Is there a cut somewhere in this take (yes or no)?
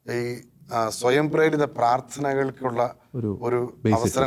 no